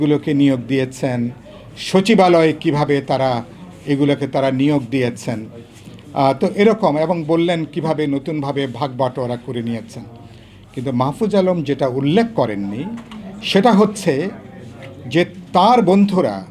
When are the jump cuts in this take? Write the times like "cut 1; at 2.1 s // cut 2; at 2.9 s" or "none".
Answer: none